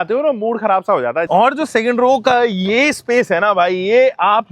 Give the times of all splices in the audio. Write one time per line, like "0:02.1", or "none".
0:01.3